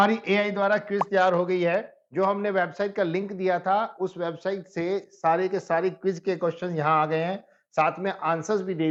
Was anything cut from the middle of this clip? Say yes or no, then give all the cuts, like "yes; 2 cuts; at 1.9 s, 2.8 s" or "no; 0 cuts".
no; 0 cuts